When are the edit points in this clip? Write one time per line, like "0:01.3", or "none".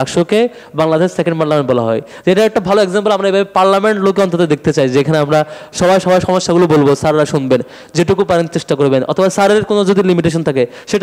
none